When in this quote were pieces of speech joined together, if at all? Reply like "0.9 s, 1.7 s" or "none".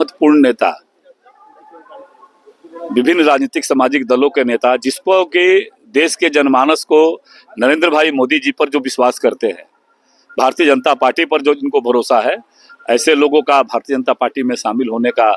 none